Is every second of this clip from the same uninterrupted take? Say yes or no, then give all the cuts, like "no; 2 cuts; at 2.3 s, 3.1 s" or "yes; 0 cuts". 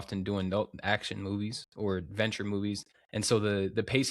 no; 1 cut; at 2.9 s